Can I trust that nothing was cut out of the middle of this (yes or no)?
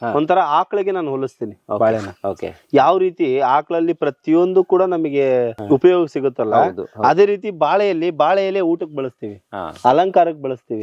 no